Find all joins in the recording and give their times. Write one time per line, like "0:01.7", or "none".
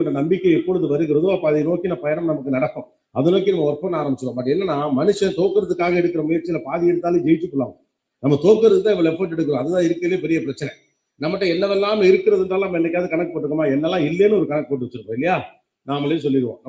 none